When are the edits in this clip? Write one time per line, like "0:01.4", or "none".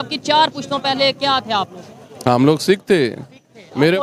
none

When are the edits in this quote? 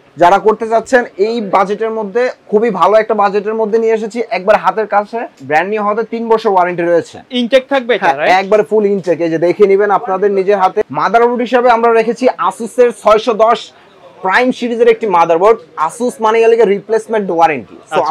0:05.4
0:10.9

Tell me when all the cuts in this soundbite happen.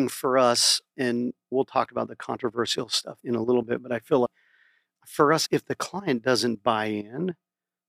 0:01.1
0:03.1
0:04.3

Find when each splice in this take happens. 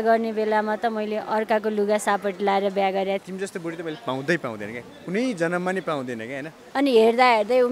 0:03.2
0:06.6

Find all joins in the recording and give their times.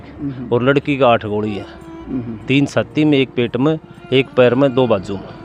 none

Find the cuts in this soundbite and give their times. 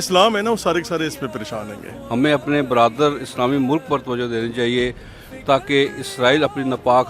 0:01.9

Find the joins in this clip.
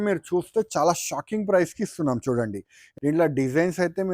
0:02.8

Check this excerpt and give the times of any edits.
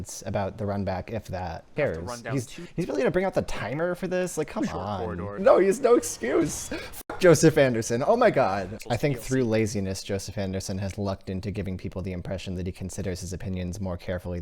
0:01.7
0:05.4
0:08.7

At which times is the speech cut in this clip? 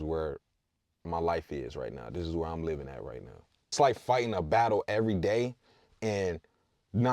0:03.7

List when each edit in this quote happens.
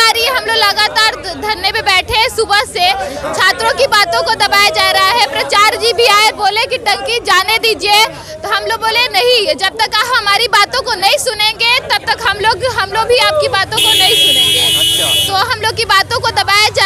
none

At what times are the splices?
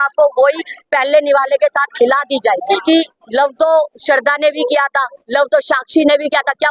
0:02.8

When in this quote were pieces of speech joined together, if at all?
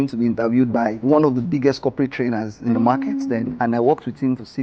0:01.0
0:03.5

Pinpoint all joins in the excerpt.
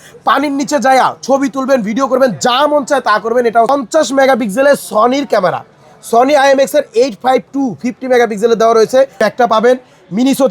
0:03.7
0:09.2

